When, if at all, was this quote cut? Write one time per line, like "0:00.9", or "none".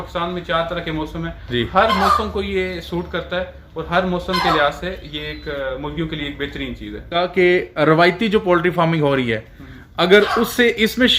0:07.2